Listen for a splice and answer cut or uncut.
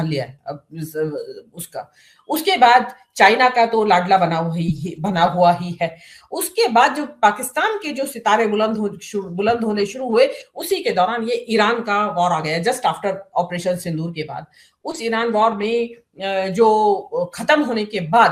uncut